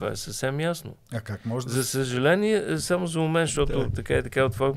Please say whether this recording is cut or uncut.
uncut